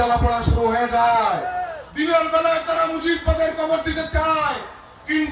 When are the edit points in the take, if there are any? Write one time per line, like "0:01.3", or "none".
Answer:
0:01.8